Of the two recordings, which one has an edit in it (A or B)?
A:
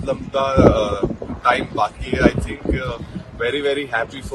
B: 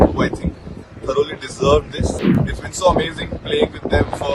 B